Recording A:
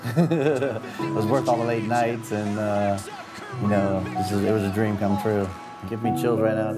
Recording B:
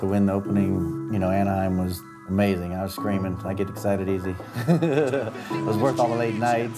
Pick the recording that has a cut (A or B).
B